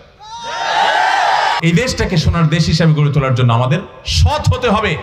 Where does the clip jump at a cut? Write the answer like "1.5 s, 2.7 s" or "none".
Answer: 1.6 s